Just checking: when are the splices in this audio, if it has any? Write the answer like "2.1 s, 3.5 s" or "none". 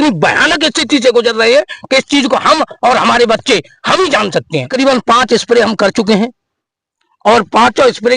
4.7 s